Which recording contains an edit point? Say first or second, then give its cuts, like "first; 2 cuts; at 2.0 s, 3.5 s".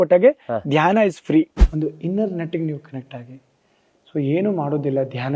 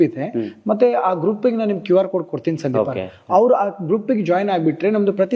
first; 1 cut; at 1.6 s